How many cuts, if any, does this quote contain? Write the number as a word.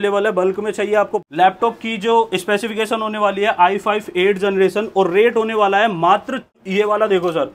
two